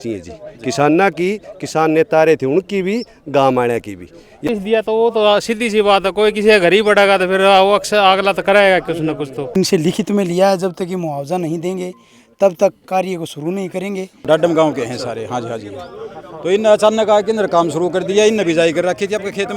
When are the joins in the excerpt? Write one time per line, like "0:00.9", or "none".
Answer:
0:04.4
0:09.6
0:14.2